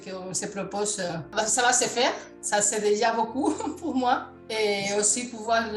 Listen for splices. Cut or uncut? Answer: cut